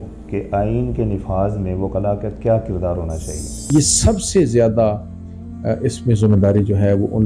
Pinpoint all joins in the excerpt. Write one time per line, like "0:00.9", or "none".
0:03.6